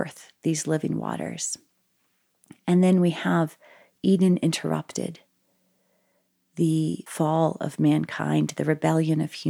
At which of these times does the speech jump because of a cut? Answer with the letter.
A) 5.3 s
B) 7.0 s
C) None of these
B